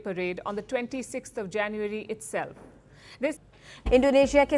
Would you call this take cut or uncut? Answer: cut